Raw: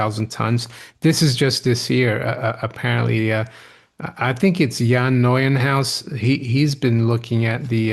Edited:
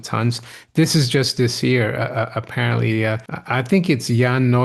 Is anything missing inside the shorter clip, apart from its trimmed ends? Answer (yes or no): yes